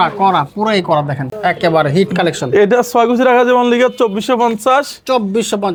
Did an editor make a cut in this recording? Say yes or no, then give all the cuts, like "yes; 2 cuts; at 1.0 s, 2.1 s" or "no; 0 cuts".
no; 0 cuts